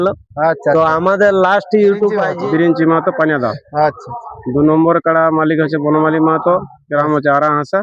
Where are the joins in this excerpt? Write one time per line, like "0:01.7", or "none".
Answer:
0:02.3